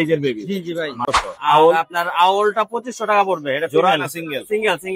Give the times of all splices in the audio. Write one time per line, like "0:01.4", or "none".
0:01.1